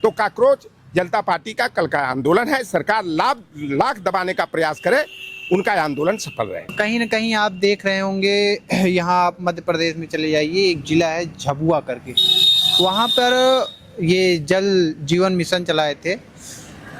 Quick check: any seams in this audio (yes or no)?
no